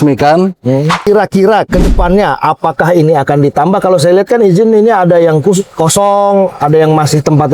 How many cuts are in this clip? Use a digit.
1